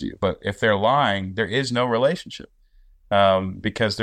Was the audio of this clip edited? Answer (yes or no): no